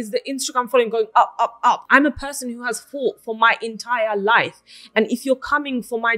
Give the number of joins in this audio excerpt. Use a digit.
1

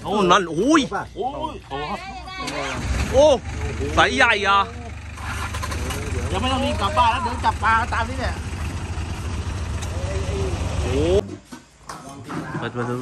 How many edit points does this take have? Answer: 1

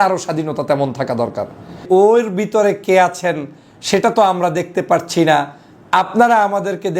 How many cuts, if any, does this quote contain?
1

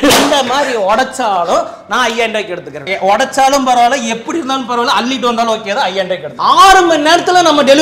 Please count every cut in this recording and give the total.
2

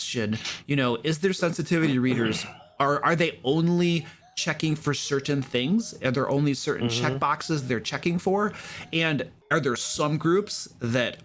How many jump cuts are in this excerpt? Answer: 1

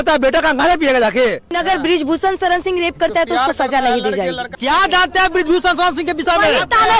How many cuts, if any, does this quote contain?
2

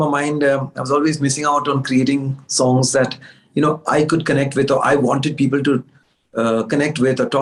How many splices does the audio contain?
0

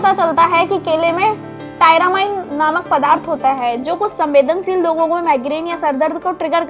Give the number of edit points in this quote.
0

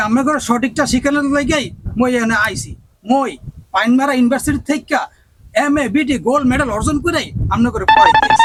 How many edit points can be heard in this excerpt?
0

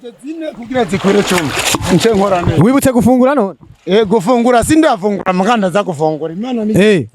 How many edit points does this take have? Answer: 0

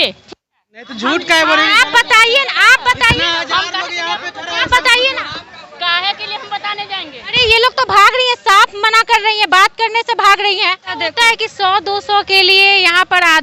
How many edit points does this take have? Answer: 1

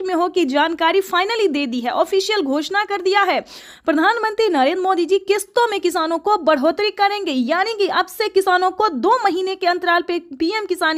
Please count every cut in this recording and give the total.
0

